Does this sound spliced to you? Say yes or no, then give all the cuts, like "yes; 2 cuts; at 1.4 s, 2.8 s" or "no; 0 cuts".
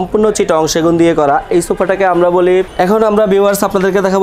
yes; 1 cut; at 2.7 s